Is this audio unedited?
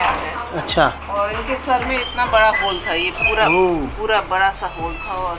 yes; 0 cuts

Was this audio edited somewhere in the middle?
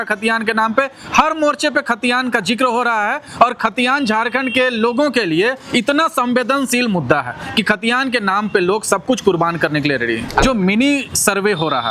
yes; 1 cut; at 10.4 s

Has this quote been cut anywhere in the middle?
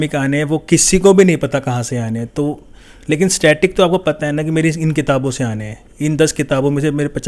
no; 0 cuts

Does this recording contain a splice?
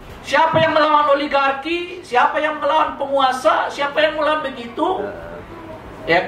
no; 0 cuts

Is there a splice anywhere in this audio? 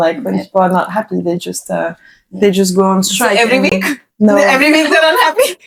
no; 0 cuts

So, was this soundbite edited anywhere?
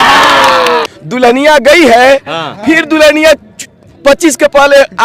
yes; 1 cut; at 1.0 s

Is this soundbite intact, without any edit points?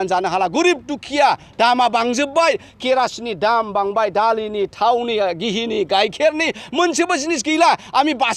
yes; 0 cuts

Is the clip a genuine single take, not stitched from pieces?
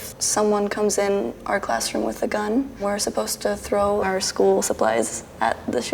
no; 1 cut; at 4.1 s

